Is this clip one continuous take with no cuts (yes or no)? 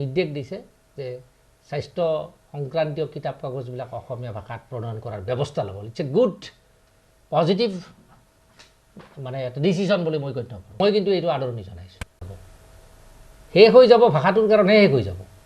no